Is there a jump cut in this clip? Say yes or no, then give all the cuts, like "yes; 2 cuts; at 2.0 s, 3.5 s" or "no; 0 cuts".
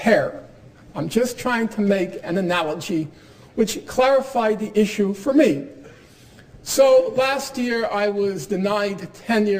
no; 0 cuts